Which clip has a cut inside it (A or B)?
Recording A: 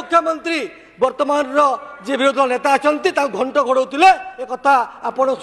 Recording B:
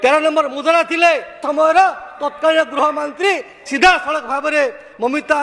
B